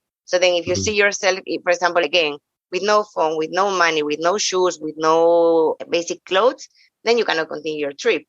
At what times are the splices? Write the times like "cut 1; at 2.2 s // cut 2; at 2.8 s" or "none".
cut 1; at 2.0 s // cut 2; at 5.8 s